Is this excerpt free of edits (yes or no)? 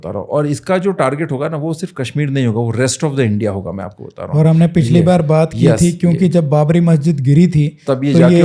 yes